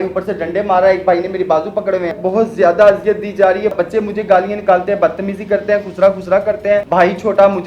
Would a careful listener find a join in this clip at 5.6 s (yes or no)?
no